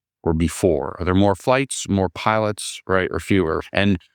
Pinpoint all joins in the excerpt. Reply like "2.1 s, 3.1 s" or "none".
1.4 s